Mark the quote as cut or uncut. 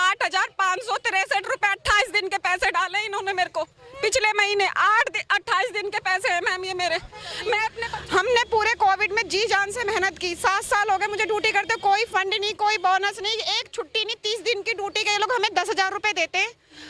cut